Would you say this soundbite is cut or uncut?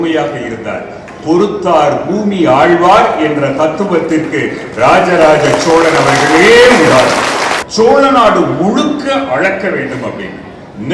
cut